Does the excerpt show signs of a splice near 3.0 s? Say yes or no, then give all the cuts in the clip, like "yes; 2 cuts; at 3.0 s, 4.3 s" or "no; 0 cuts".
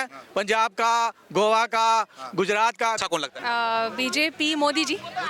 yes; 1 cut; at 3.0 s